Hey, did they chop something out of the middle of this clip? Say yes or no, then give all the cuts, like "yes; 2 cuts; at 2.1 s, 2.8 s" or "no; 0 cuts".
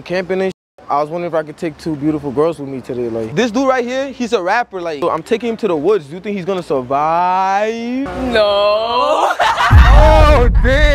yes; 2 cuts; at 3.3 s, 4.9 s